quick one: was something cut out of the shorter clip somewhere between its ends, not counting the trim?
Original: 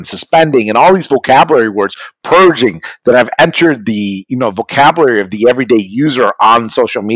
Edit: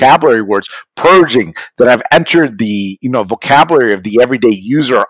no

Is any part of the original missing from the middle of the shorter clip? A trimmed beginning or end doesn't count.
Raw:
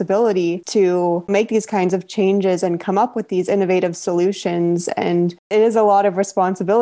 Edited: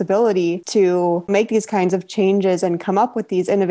no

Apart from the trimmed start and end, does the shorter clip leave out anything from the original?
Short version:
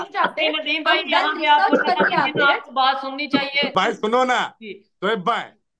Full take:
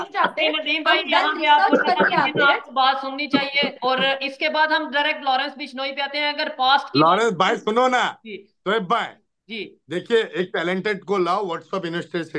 yes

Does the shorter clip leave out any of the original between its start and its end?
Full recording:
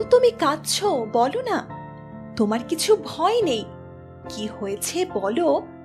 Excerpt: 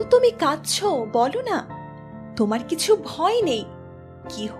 no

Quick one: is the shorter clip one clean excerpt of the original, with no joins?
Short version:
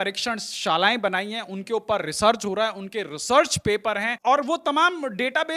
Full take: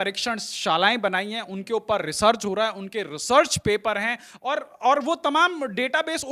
no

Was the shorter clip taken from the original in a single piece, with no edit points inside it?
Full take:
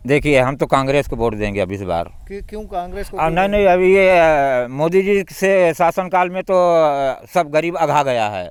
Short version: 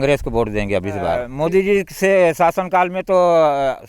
no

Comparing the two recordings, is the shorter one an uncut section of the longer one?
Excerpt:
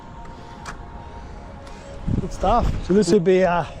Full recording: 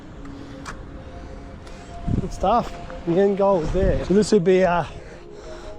no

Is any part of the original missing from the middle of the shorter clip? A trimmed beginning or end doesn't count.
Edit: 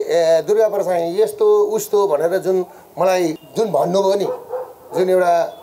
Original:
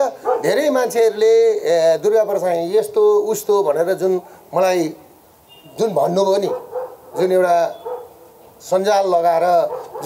yes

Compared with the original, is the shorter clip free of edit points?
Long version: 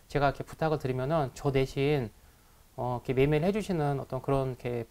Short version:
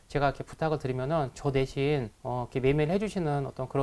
no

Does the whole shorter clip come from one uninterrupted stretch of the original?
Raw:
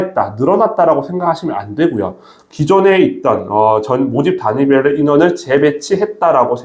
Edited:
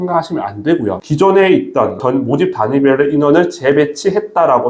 no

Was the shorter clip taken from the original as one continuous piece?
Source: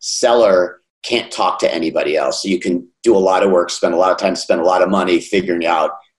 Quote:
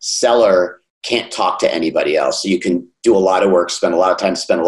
yes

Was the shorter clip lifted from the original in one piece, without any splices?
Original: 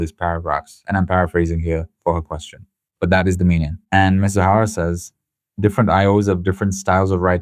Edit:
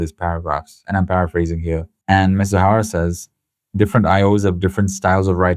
no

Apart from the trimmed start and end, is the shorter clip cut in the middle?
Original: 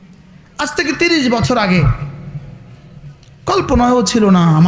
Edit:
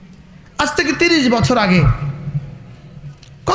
no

